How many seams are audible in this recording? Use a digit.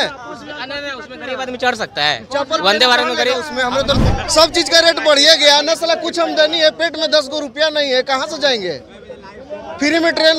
1